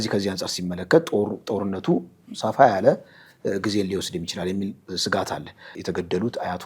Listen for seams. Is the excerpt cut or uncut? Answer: cut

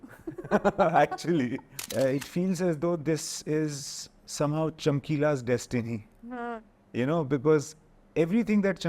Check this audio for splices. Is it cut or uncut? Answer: cut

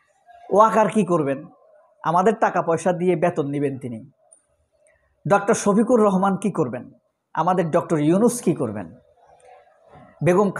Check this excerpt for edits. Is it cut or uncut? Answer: uncut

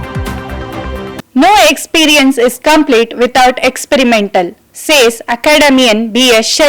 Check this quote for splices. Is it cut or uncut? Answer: uncut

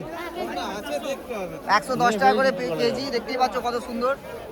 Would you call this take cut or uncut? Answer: uncut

